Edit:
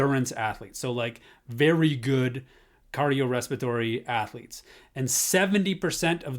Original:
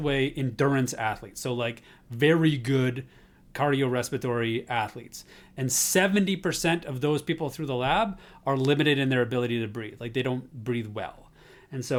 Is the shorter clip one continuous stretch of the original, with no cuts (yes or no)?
yes